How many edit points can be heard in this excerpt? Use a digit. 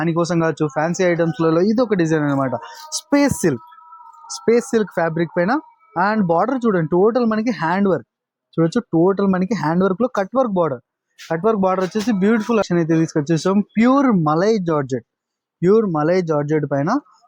1